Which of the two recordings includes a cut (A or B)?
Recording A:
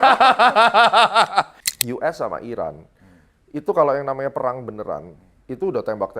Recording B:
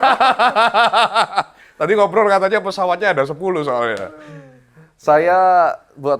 A